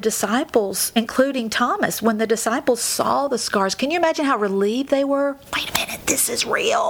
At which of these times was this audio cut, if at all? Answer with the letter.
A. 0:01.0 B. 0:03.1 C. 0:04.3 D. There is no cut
A